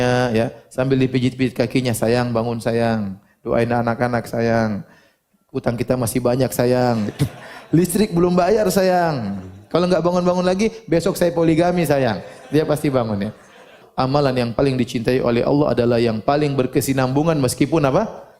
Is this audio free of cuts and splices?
no; 1 cut; at 13.8 s

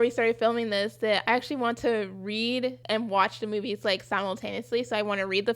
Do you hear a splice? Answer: yes; 2 cuts; at 1.2 s, 2.8 s

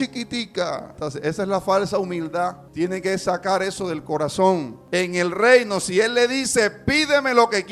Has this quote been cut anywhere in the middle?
yes; 3 cuts; at 1.0 s, 2.6 s, 4.8 s

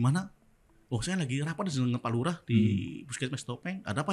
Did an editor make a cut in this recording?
no; 0 cuts

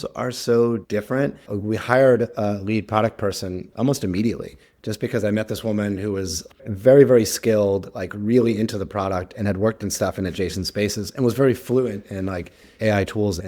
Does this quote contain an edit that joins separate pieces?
yes; 2 cuts; at 0.9 s, 6.7 s

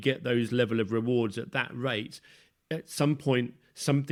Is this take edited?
no; 0 cuts

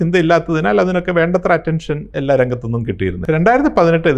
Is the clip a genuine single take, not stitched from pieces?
no; 2 cuts; at 2.0 s, 3.2 s

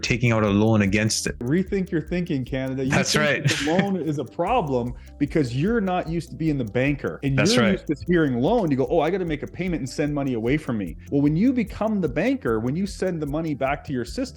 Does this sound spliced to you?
yes; 2 cuts; at 7.1 s, 11.0 s

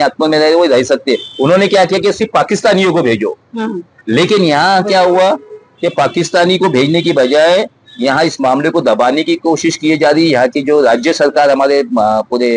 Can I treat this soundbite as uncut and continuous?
yes; 0 cuts

